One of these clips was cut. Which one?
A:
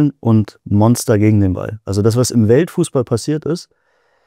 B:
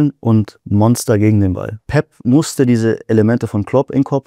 B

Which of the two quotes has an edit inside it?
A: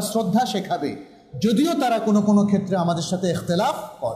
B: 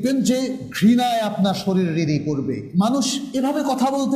B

